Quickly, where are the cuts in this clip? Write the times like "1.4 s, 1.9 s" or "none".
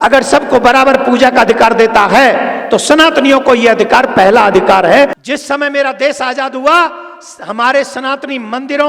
5.2 s